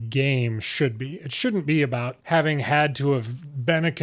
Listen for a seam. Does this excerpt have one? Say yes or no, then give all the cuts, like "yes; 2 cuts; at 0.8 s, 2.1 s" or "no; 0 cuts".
yes; 1 cut; at 2.1 s